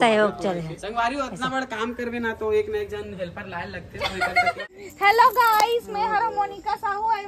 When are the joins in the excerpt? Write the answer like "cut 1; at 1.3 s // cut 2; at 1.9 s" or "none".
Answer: cut 1; at 4.6 s